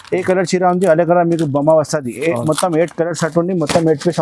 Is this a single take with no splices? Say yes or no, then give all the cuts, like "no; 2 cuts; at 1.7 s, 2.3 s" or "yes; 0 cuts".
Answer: yes; 0 cuts